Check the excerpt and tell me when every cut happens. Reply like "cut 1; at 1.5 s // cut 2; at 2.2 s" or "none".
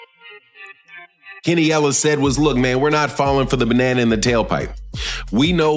cut 1; at 3.4 s